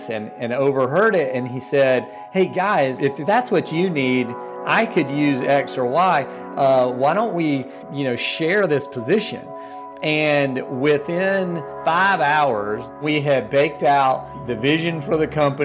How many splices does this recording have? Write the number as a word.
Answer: five